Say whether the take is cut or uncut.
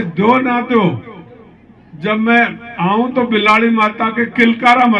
uncut